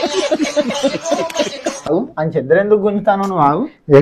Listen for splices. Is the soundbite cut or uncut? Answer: cut